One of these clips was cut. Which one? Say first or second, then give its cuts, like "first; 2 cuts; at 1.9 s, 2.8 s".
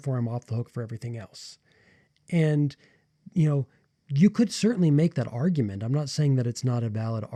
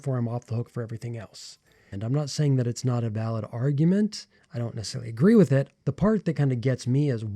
second; 2 cuts; at 2.0 s, 5.8 s